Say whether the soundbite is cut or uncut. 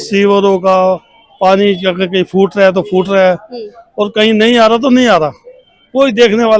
uncut